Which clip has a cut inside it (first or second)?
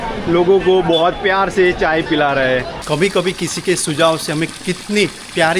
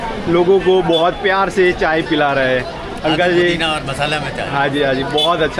first